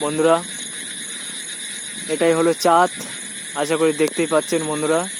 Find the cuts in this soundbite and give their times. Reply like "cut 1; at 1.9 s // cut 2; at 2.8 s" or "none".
none